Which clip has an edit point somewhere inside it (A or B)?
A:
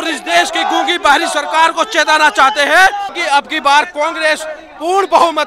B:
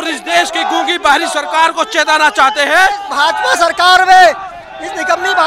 B